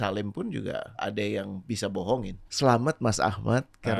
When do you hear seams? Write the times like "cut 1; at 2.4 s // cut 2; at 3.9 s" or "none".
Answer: cut 1; at 0.9 s // cut 2; at 2.4 s

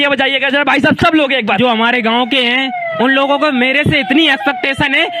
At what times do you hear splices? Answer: cut 1; at 1.6 s

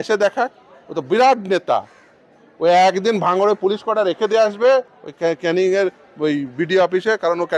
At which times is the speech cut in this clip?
none

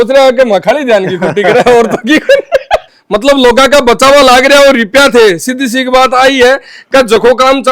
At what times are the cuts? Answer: cut 1; at 2.9 s

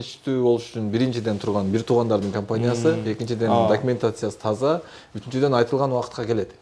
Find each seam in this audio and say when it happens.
none

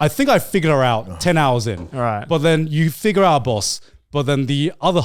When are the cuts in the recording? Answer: none

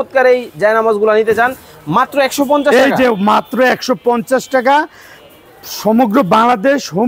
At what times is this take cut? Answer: none

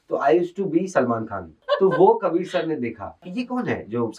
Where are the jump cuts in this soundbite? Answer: cut 1; at 1.5 s // cut 2; at 3.2 s

